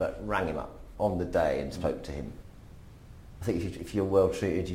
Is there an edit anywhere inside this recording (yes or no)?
yes